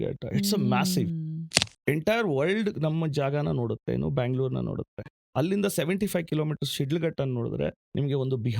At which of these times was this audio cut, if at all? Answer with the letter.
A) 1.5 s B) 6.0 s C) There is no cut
A